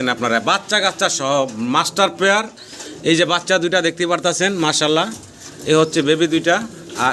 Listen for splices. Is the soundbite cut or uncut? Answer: uncut